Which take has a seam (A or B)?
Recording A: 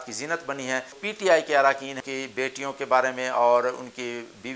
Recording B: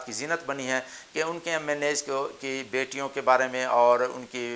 A